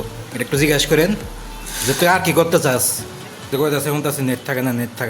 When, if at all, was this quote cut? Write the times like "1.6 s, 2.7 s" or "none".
3.5 s